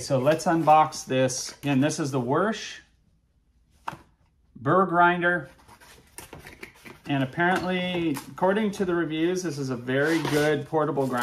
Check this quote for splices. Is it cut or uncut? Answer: uncut